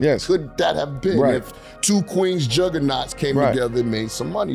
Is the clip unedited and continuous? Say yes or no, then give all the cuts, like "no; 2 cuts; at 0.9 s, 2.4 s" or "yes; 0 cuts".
yes; 0 cuts